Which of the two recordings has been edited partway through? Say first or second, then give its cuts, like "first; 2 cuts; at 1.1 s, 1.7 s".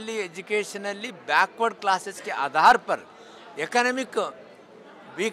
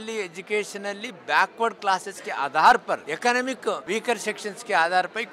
second; 2 cuts; at 3.1 s, 3.8 s